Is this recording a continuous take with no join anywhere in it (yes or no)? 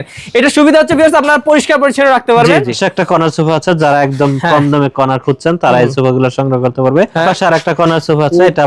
no